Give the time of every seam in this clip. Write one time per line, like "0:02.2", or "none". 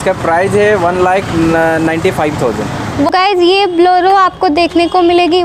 0:03.1